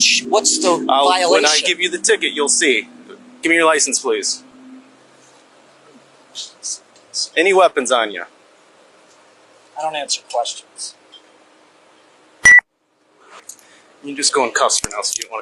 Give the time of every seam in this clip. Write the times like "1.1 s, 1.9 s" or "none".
13.5 s